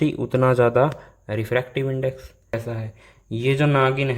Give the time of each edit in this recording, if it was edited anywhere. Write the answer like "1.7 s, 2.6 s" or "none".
2.6 s